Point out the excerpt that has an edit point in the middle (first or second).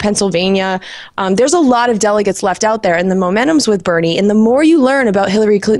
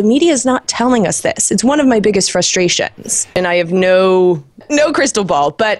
second